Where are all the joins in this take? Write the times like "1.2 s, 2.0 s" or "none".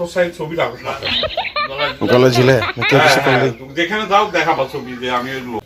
none